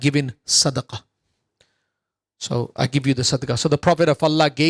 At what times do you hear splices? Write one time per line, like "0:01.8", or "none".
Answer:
none